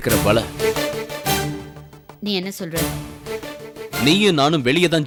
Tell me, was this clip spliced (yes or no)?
no